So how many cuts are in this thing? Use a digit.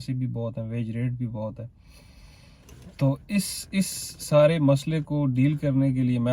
0